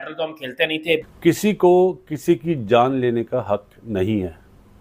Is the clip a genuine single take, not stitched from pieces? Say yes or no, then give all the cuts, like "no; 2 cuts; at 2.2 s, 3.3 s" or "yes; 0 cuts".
no; 1 cut; at 1.0 s